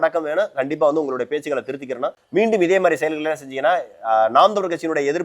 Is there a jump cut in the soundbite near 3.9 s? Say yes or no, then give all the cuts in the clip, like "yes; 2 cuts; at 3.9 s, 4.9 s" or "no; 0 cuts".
no; 1 cut; at 2.2 s